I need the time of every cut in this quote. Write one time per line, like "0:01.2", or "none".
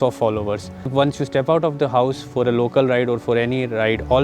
0:00.9